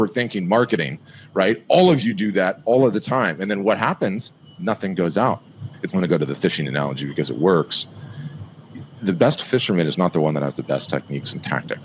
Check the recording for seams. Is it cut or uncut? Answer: uncut